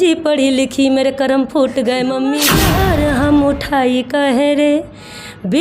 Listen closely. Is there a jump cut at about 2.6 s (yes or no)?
yes